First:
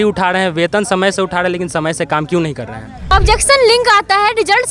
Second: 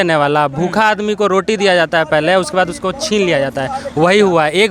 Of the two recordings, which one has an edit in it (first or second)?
first